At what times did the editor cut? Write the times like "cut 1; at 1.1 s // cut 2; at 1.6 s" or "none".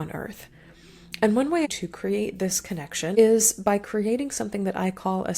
cut 1; at 1.7 s // cut 2; at 3.2 s